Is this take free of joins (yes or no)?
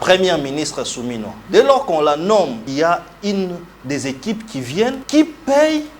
no